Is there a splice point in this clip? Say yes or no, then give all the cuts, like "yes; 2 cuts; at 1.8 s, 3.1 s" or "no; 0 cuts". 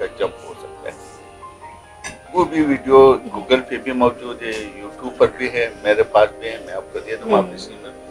no; 0 cuts